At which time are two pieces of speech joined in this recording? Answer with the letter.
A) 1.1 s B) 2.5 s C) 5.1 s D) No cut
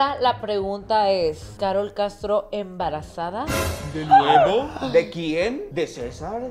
D